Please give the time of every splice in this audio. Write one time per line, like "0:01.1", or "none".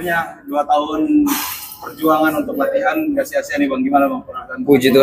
none